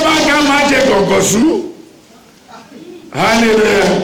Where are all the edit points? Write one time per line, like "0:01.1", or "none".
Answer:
none